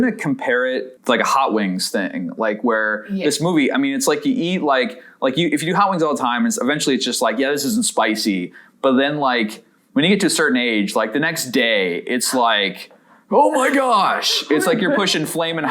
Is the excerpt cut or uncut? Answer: cut